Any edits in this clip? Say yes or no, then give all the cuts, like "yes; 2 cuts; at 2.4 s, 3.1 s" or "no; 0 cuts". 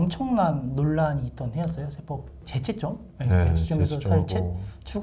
yes; 1 cut; at 2.5 s